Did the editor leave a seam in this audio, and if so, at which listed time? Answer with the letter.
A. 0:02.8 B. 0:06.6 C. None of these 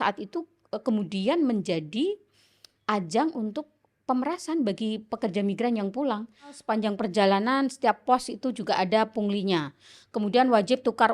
B